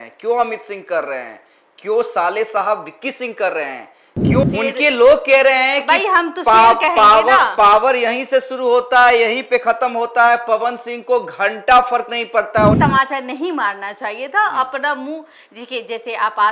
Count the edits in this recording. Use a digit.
2